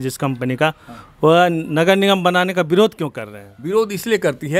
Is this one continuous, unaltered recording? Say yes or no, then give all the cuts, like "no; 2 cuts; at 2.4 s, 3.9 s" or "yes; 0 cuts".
yes; 0 cuts